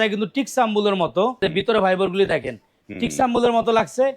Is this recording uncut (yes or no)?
no